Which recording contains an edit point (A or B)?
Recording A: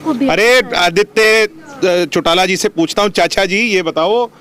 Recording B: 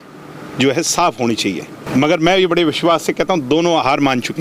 B